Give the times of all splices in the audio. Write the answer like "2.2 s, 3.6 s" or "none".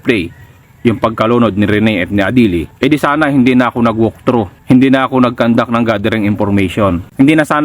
2.7 s, 4.5 s